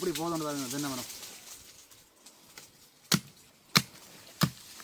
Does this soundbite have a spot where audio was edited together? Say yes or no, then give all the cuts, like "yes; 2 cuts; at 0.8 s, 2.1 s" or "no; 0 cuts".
no; 0 cuts